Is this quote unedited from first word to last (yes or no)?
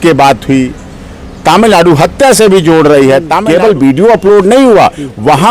no